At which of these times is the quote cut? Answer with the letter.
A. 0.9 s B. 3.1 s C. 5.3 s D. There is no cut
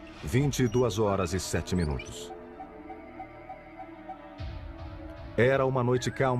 A